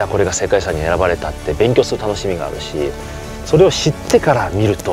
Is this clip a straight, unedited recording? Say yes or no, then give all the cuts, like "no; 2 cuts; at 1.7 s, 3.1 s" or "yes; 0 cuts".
yes; 0 cuts